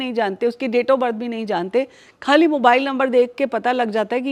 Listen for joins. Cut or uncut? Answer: uncut